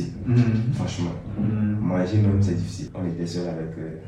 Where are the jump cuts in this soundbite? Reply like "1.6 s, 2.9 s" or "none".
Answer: 2.9 s